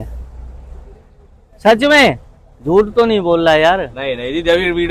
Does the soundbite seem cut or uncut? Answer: uncut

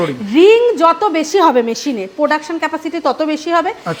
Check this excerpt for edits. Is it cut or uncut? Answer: uncut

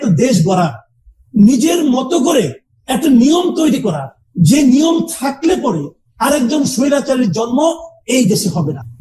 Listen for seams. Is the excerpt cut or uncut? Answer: uncut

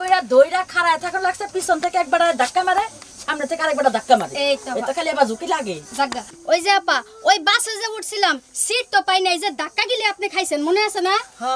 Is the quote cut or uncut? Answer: uncut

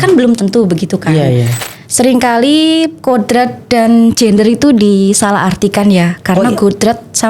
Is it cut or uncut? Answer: cut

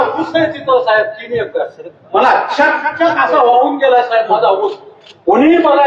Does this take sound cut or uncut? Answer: uncut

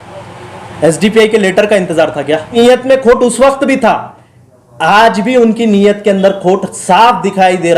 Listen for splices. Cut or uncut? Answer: cut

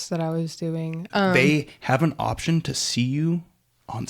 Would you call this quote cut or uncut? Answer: cut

